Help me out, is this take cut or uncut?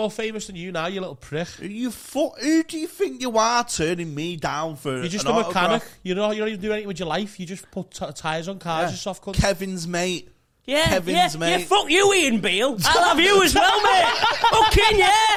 uncut